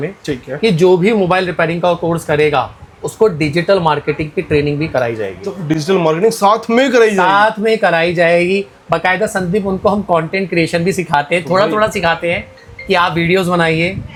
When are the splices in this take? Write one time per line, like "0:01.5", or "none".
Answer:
none

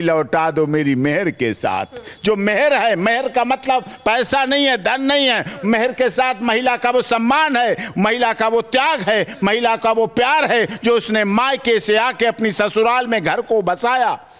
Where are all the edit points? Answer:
none

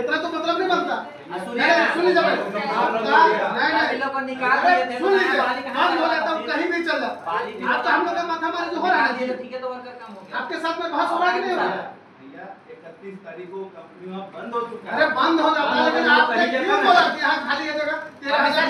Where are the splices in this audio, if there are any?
none

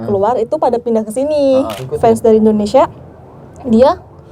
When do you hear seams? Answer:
0:01.8

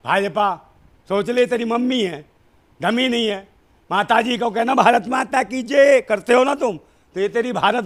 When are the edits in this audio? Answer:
none

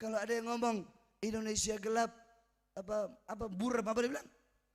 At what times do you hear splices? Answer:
none

